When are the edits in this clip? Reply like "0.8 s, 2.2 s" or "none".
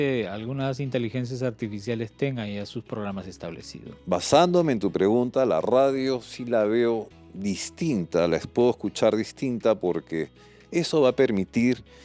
none